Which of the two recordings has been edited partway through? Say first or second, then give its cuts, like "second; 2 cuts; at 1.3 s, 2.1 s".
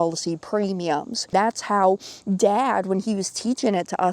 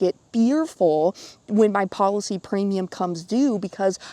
first; 1 cut; at 1.3 s